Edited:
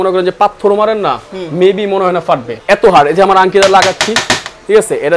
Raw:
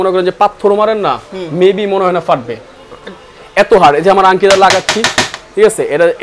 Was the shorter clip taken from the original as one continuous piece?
no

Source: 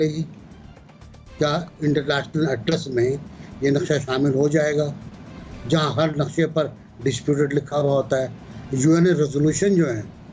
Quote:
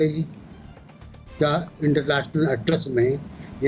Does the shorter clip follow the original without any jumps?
yes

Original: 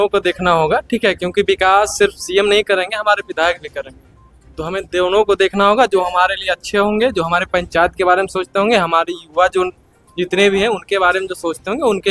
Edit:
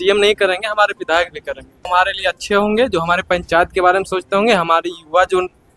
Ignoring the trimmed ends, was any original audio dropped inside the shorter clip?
yes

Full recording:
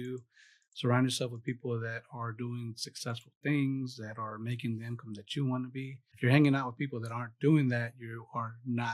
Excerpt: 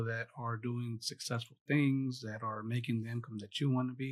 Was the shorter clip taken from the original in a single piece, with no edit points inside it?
yes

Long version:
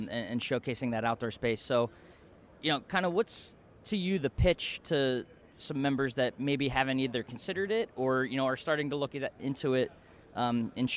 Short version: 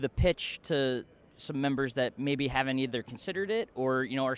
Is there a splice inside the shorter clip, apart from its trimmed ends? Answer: no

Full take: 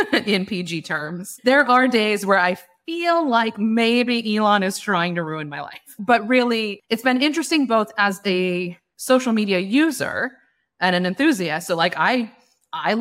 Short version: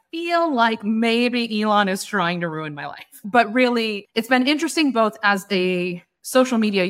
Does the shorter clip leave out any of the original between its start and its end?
no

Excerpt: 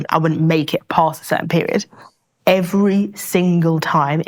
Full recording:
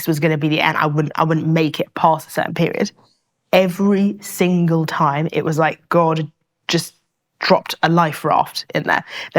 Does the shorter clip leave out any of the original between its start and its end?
no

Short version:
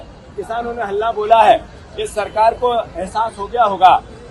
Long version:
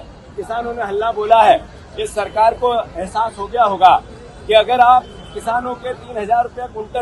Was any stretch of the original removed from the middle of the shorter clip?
no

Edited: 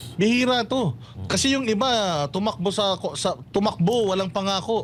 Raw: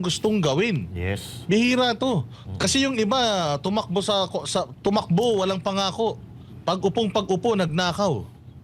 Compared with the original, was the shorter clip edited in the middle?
no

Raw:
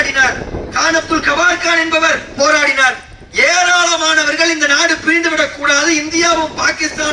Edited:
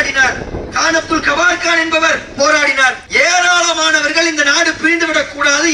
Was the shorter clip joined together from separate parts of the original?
yes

